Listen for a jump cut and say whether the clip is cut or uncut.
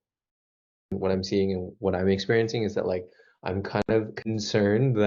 cut